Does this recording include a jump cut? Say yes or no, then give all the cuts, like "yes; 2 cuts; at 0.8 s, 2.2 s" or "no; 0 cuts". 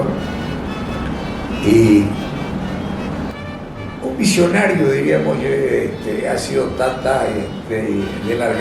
yes; 1 cut; at 3.3 s